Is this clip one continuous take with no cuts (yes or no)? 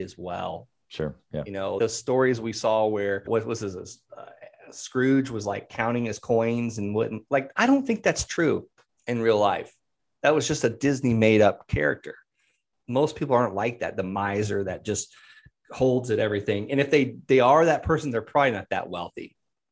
no